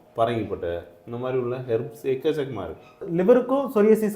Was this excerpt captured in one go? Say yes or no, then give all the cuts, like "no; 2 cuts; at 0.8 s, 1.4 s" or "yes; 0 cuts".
no; 1 cut; at 3.0 s